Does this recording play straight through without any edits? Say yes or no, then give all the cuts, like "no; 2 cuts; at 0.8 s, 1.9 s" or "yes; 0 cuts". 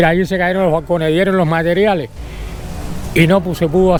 yes; 0 cuts